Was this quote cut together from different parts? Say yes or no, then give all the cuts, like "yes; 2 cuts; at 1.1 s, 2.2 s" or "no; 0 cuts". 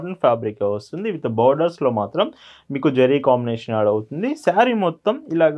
no; 0 cuts